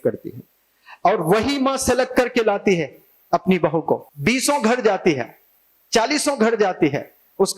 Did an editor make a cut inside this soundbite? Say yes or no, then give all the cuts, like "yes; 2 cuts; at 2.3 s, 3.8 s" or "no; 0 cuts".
yes; 1 cut; at 4.0 s